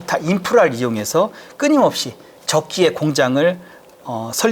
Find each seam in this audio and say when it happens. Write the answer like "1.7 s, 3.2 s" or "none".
none